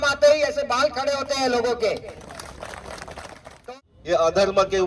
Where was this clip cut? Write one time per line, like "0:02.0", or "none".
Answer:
0:03.5